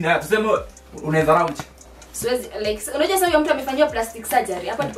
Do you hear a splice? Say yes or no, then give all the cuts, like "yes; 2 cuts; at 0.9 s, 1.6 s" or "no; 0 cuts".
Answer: no; 0 cuts